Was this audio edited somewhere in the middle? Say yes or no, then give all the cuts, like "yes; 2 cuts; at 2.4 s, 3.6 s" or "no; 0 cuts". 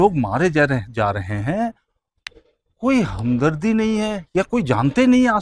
no; 0 cuts